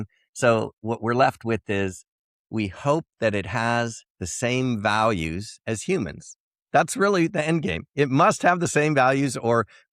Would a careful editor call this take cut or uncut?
uncut